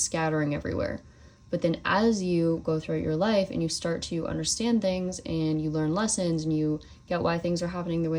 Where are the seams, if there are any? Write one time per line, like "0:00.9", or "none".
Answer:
none